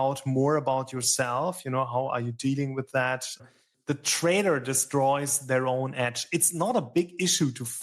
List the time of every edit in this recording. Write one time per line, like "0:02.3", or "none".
0:03.5

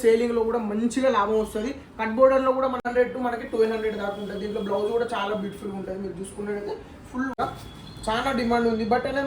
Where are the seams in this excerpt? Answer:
0:02.8
0:07.4

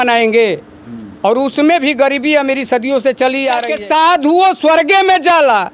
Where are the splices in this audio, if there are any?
0:03.7

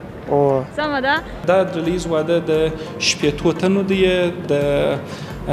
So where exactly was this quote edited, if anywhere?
0:01.4

